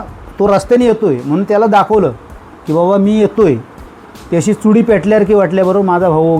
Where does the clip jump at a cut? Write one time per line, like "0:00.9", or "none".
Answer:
none